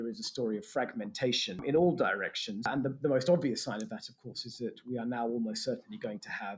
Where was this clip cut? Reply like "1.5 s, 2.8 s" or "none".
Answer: 1.6 s, 2.7 s